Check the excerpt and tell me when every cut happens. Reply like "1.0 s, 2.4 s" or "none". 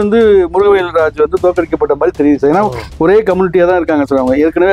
none

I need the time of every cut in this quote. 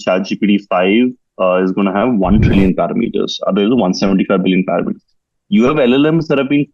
none

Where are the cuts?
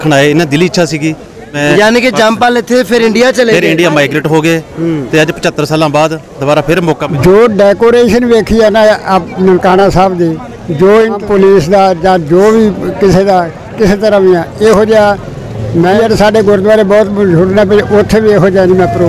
1.6 s, 7.0 s, 11.2 s, 15.9 s

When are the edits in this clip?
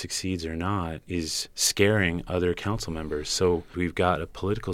1.1 s, 3.7 s

